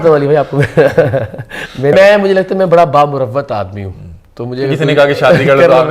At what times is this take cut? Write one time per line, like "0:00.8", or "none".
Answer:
0:01.9